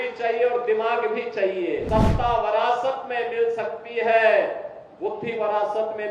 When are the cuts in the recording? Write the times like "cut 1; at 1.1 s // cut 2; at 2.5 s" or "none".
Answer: cut 1; at 1.9 s